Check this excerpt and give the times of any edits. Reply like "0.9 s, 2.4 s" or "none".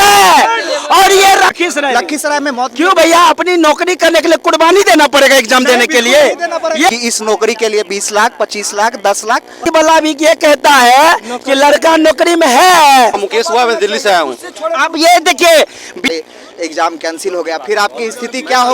1.5 s, 6.9 s, 9.7 s, 13.2 s, 15.9 s